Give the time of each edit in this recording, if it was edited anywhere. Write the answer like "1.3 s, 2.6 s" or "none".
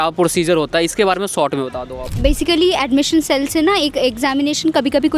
none